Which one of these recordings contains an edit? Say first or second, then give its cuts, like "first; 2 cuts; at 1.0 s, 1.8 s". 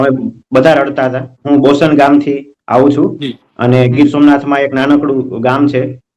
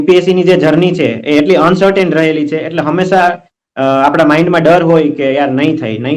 first; 1 cut; at 1.3 s